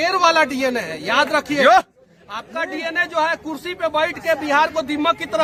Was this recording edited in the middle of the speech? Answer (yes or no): no